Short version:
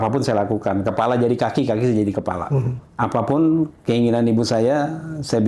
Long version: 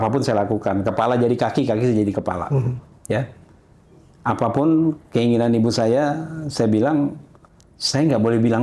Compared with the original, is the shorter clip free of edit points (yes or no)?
no